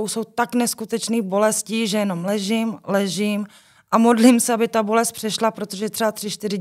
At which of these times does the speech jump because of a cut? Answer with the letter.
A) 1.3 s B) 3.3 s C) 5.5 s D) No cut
D